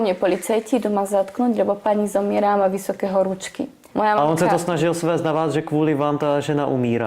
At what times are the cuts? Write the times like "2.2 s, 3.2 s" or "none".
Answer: 3.8 s